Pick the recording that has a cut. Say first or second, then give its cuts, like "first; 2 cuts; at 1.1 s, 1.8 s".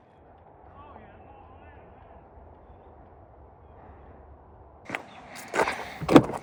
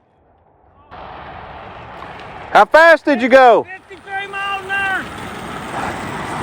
second; 1 cut; at 0.9 s